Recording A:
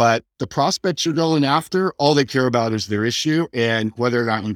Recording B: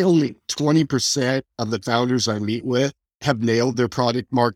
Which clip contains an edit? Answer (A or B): B